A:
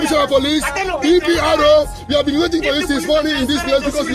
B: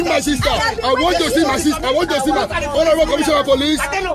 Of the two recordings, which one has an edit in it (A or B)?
B